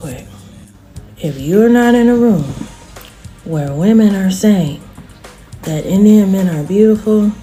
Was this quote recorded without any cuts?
yes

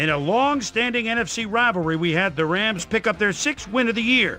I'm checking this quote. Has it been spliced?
yes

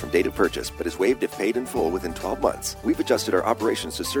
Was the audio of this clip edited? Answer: yes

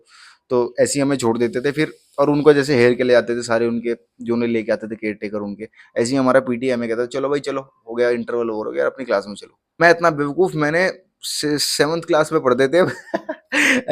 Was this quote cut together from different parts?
yes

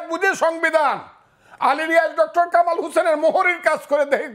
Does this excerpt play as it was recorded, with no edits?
yes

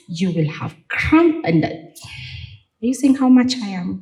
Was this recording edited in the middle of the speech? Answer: no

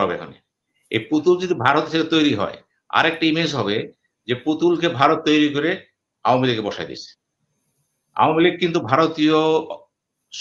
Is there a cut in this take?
no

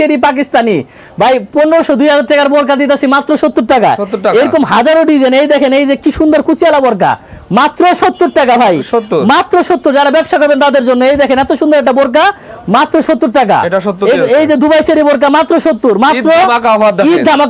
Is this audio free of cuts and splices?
yes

